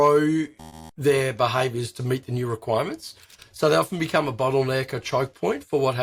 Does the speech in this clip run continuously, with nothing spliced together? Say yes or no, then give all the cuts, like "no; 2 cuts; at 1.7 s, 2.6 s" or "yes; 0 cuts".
yes; 0 cuts